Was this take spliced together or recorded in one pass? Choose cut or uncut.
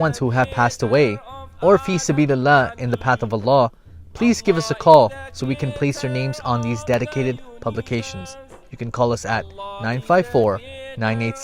uncut